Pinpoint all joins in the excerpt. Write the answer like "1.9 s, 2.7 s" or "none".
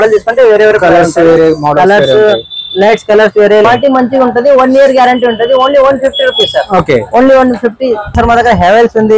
3.6 s, 8.1 s